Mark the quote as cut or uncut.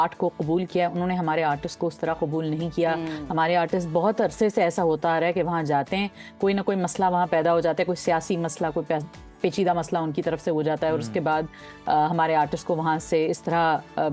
uncut